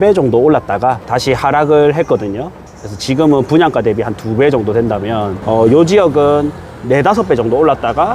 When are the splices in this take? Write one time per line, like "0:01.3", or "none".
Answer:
0:01.1
0:05.4